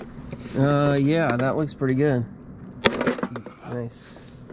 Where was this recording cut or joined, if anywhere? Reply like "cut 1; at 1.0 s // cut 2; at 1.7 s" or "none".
none